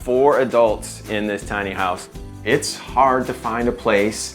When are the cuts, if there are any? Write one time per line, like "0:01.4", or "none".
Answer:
0:02.3